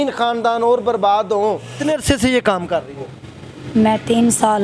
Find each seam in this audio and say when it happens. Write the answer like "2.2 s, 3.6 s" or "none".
1.8 s